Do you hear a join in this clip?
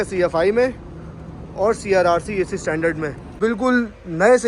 yes; 1 cut; at 3.2 s

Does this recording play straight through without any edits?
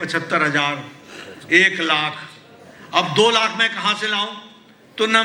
yes; 0 cuts

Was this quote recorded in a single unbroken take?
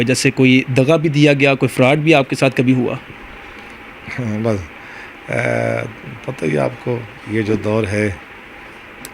yes; 0 cuts

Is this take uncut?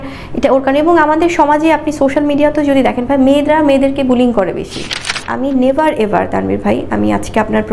no; 1 cut; at 5.2 s

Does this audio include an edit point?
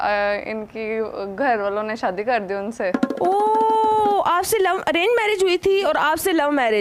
no; 0 cuts

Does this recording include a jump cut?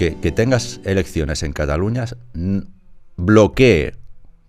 no; 0 cuts

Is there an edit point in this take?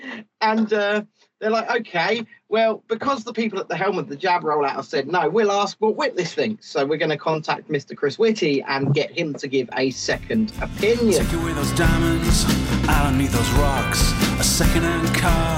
yes; 1 cut; at 11.3 s

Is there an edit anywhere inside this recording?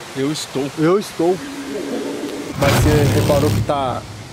yes; 1 cut; at 2.6 s

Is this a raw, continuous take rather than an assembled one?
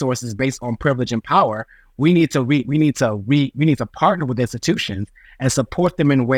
yes; 0 cuts

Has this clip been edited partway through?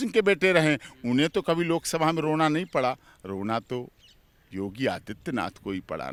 no; 0 cuts

